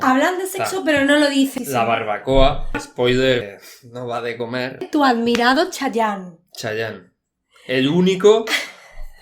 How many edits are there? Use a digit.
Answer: 4